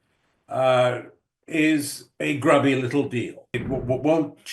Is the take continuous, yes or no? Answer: no